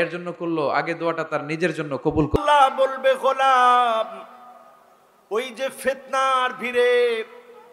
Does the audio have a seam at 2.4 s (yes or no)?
yes